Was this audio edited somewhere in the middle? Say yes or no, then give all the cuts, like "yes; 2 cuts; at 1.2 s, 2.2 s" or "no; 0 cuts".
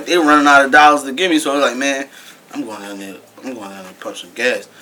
no; 0 cuts